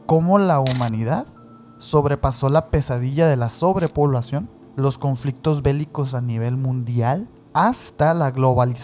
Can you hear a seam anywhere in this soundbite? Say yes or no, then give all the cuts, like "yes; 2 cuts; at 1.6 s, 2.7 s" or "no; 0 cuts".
yes; 2 cuts; at 4.6 s, 7.4 s